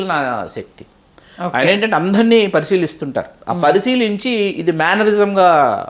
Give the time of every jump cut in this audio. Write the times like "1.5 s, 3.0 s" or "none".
none